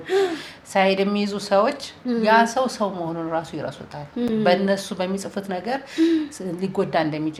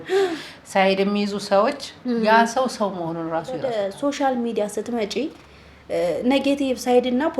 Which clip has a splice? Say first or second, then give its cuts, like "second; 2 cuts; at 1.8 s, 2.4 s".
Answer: second; 1 cut; at 3.6 s